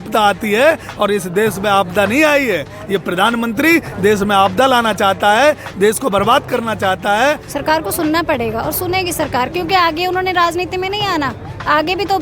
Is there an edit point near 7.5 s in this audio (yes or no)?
yes